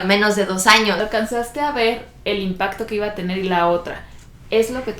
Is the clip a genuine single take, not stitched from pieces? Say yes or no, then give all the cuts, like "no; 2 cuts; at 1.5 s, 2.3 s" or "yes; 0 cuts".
no; 1 cut; at 1.0 s